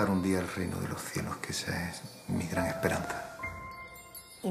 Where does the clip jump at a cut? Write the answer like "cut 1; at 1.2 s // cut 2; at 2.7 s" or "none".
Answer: cut 1; at 1.3 s